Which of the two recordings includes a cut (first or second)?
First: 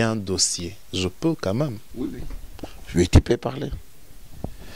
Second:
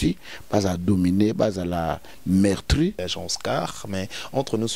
second